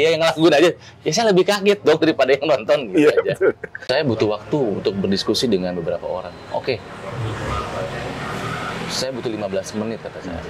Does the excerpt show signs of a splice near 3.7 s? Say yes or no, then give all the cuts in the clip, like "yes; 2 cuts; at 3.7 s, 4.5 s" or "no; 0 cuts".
yes; 1 cut; at 3.7 s